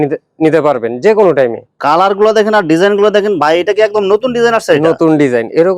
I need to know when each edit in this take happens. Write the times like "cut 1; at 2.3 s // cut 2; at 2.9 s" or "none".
cut 1; at 1.7 s